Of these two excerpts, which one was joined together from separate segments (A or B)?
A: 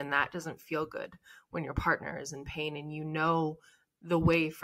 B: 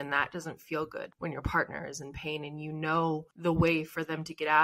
B